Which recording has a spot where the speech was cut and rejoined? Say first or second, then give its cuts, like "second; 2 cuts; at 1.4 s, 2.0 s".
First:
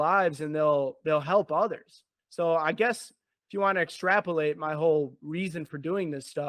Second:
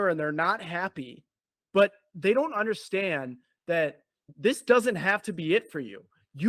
second; 1 cut; at 4.3 s